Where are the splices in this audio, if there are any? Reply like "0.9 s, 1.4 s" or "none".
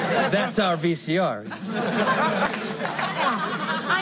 2.5 s